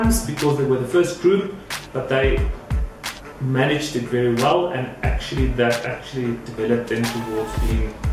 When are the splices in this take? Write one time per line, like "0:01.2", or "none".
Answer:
none